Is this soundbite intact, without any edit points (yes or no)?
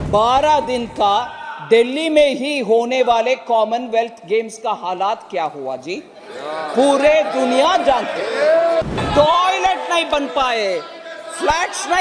no